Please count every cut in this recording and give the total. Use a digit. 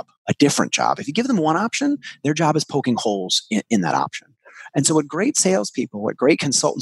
0